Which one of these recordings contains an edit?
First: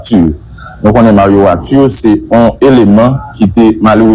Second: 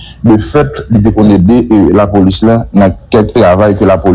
first; 1 cut; at 2.2 s

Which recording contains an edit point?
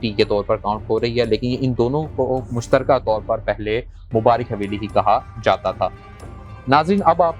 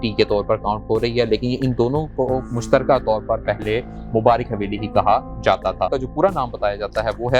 second; 1 cut; at 5.9 s

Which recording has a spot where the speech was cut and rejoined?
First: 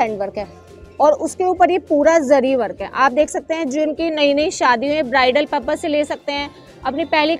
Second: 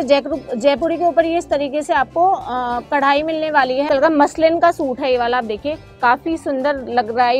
second; 1 cut; at 3.9 s

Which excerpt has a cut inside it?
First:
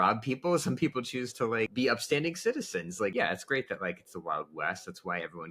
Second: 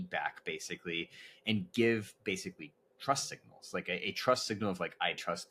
first; 2 cuts; at 1.7 s, 3.1 s

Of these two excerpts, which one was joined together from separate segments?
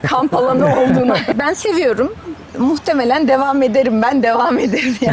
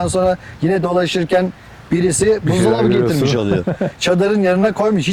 first; 1 cut; at 1.3 s

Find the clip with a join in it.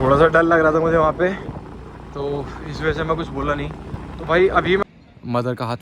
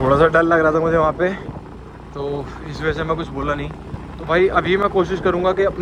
first; 1 cut; at 4.8 s

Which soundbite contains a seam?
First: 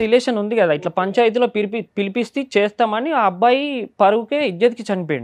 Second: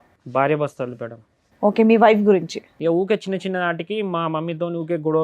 second; 1 cut; at 2.6 s

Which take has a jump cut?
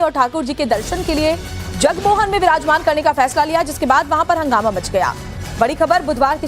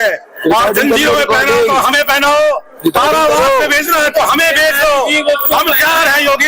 first; 1 cut; at 4.4 s

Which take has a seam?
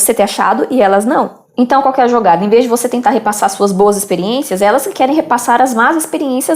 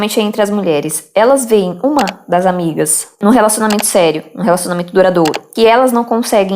second; 1 cut; at 5.4 s

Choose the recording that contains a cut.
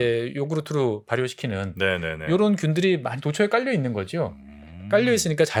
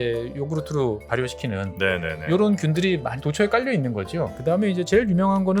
second; 1 cut; at 4.4 s

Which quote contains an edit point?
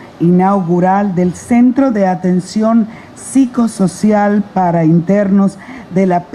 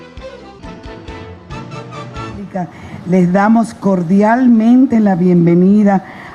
second; 1 cut; at 1.5 s

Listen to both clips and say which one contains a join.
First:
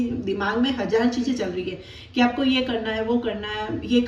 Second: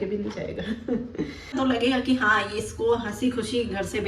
second; 1 cut; at 1.5 s

